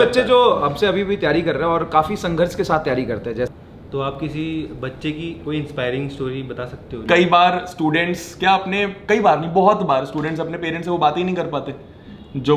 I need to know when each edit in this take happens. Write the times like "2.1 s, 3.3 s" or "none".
3.5 s, 7.0 s